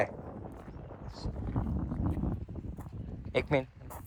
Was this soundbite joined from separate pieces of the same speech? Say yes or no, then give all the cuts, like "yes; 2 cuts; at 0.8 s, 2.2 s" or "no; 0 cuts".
no; 0 cuts